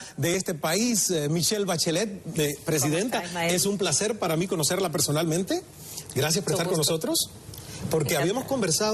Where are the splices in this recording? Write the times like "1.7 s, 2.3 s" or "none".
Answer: 3.2 s